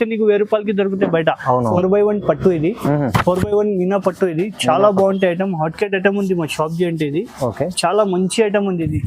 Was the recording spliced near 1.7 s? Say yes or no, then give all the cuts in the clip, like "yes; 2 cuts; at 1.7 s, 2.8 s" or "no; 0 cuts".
yes; 1 cut; at 1.7 s